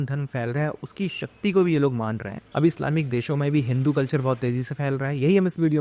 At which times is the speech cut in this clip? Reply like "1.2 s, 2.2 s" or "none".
none